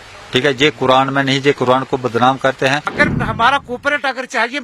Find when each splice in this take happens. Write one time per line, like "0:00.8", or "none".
0:02.9